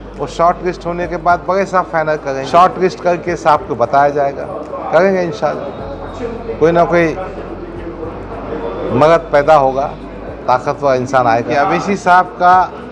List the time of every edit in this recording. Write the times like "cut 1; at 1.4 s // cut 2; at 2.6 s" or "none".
cut 1; at 2.4 s // cut 2; at 11.5 s